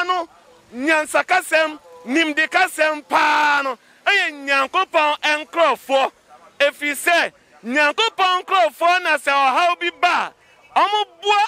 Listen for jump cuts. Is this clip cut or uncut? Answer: uncut